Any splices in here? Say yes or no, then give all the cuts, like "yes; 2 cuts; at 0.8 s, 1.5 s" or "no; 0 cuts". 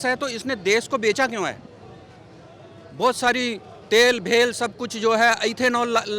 no; 0 cuts